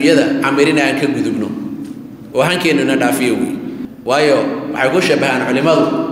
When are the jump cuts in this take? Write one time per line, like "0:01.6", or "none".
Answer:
0:03.9